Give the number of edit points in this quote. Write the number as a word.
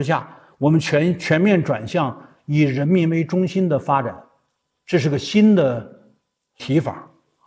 zero